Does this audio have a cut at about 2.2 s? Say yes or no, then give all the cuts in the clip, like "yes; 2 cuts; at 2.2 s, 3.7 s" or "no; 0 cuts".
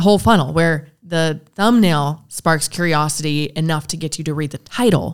no; 1 cut; at 1.0 s